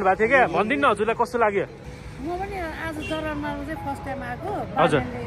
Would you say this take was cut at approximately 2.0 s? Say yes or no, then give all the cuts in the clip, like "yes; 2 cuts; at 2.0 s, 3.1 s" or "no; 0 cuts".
yes; 1 cut; at 2.0 s